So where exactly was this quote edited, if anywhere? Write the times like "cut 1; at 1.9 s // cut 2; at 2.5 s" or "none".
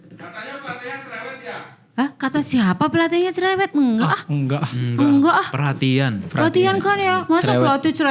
none